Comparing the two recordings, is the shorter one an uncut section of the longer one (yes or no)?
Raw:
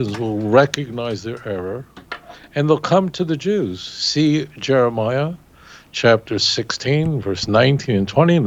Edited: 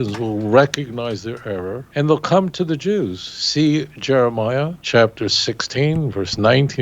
no